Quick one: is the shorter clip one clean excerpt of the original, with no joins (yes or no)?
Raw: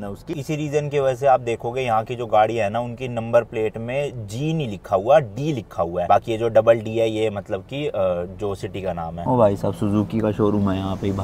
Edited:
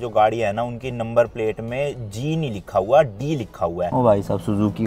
no